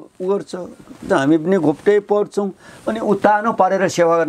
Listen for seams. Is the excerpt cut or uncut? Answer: uncut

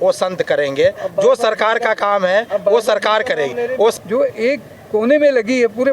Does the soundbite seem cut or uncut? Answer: cut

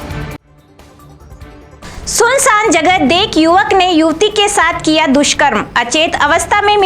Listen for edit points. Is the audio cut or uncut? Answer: cut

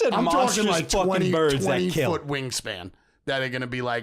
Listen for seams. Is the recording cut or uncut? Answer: uncut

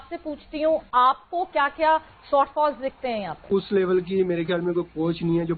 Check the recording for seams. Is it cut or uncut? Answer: uncut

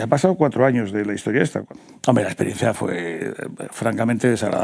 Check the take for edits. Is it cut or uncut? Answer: uncut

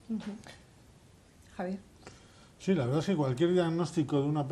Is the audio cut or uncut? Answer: uncut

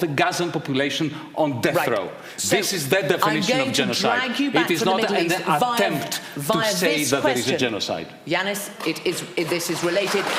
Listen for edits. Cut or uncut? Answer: uncut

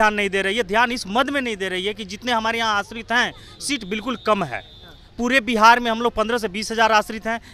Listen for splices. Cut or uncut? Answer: uncut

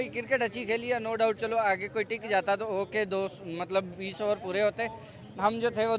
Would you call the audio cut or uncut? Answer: uncut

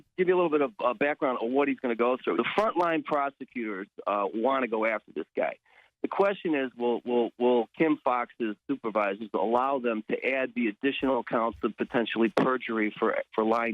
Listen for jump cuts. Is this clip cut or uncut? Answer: cut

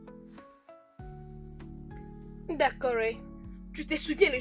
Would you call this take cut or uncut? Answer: cut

